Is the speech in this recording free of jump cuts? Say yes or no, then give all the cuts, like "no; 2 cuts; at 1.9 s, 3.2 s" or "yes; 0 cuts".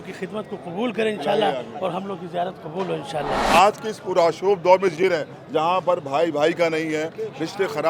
no; 1 cut; at 3.4 s